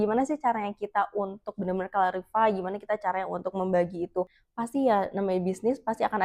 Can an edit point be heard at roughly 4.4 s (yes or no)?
yes